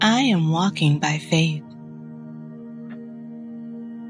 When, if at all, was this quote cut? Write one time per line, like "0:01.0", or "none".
none